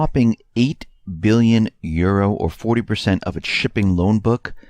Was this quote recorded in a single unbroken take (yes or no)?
no